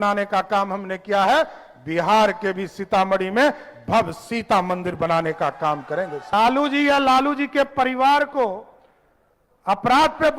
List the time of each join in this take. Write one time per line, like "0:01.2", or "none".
0:06.3